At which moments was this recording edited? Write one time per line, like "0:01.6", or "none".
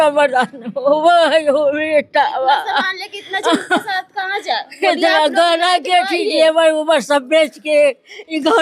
none